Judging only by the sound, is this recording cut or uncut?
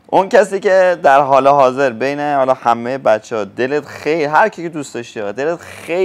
uncut